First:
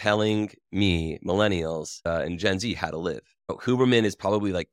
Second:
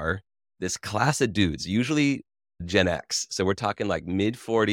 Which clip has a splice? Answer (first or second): second